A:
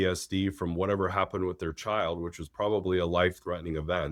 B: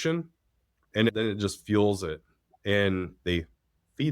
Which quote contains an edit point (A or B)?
B